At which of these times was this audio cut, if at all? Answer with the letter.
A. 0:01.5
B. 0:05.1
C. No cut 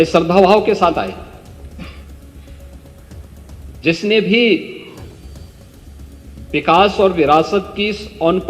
C